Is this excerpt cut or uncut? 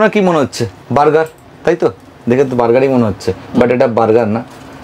uncut